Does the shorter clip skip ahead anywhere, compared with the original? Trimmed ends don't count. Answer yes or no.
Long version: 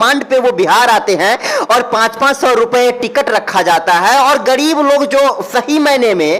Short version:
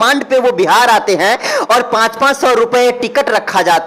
no